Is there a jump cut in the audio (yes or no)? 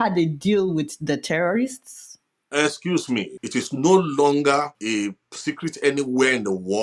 yes